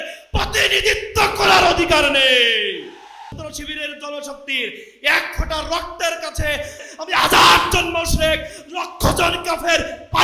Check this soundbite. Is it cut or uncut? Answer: cut